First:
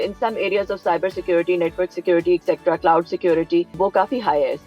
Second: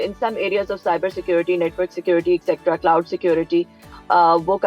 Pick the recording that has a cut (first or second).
first